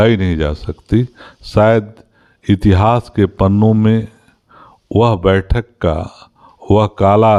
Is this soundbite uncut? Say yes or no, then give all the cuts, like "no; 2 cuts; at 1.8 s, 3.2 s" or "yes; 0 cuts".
yes; 0 cuts